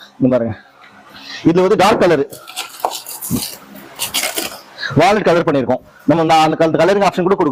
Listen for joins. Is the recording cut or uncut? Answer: uncut